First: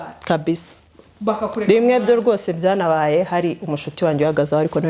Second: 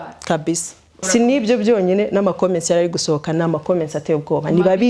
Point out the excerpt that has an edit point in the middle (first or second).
second